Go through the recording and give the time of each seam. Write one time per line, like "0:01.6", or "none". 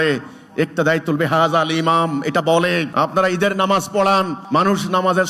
0:02.9
0:04.4